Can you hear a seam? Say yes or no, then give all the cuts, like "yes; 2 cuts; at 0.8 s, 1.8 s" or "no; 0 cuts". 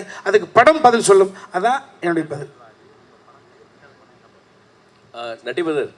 no; 0 cuts